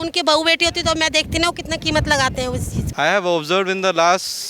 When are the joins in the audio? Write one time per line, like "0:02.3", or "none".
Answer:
0:02.8